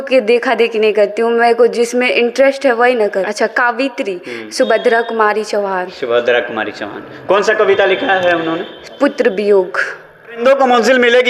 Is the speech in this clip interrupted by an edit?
yes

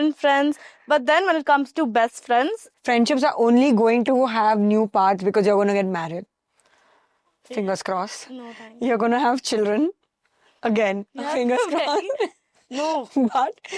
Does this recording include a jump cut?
yes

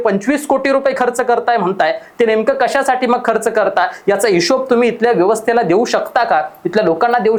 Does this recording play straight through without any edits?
yes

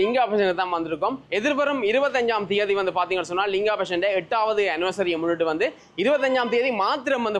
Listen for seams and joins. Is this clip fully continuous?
yes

